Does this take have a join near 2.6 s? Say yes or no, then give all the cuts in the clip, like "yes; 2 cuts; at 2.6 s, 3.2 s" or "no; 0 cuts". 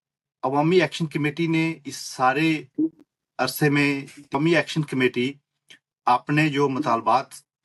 no; 1 cut; at 4.4 s